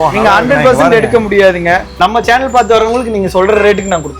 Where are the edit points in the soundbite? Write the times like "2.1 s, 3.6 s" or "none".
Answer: 1.9 s